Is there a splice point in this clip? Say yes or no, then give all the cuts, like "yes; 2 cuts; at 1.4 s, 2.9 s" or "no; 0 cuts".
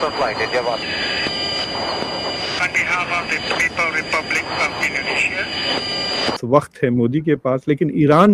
yes; 1 cut; at 6.4 s